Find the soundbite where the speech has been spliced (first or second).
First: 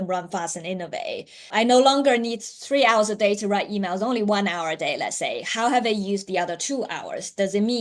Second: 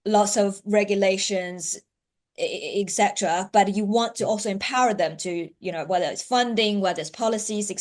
first